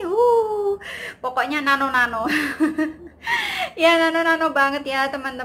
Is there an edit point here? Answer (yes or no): no